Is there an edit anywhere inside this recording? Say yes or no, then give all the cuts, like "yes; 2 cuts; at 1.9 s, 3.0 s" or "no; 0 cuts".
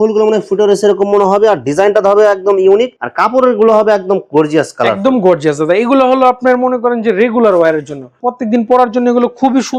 no; 0 cuts